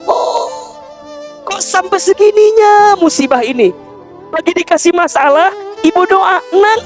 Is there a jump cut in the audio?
yes; 1 cut; at 3.9 s

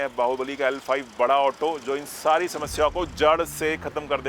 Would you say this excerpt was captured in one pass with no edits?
yes; 0 cuts

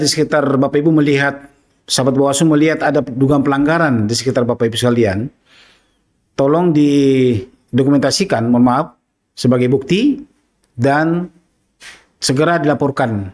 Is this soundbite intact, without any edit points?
yes; 0 cuts

